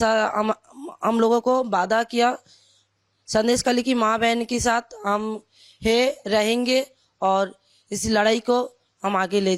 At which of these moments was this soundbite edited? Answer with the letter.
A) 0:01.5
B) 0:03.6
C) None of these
C